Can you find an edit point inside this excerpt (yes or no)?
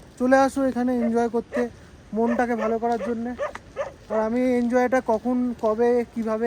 no